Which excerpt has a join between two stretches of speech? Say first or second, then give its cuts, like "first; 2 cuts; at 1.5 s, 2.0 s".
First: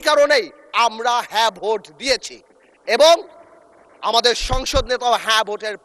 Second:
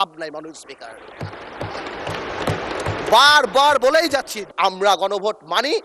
second; 1 cut; at 4.4 s